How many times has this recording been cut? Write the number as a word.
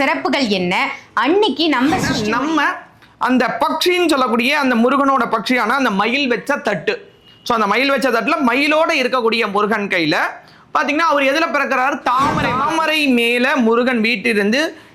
two